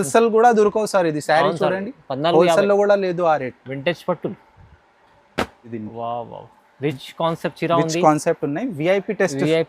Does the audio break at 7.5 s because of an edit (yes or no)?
no